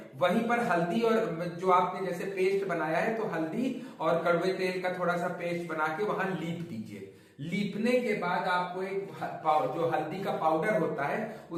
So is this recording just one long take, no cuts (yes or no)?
yes